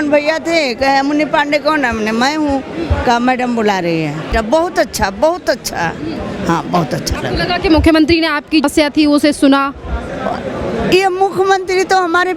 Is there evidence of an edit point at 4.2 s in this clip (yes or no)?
yes